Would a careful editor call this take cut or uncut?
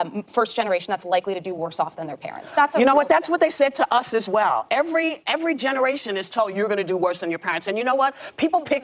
cut